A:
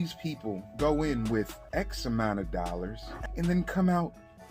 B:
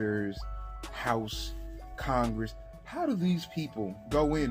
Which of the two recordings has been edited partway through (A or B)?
A